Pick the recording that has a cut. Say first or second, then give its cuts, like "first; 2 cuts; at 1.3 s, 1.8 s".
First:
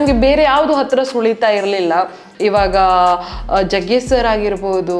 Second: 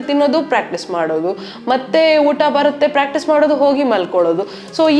first; 1 cut; at 2.2 s